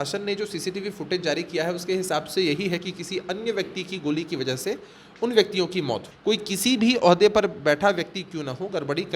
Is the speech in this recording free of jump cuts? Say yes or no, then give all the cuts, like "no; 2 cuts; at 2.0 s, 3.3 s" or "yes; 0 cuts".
no; 1 cut; at 6.1 s